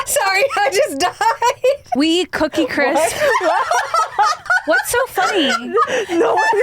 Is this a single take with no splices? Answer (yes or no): no